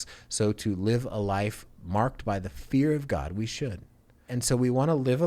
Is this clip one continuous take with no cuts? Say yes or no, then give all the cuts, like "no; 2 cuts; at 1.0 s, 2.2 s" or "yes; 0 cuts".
no; 1 cut; at 4.3 s